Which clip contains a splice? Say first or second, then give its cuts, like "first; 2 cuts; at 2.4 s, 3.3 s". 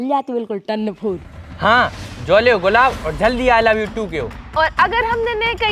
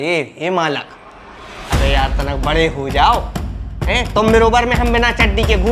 first; 2 cuts; at 1.5 s, 4.4 s